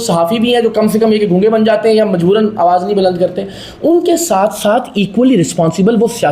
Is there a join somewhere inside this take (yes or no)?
no